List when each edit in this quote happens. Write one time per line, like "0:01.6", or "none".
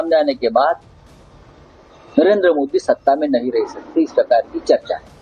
0:03.0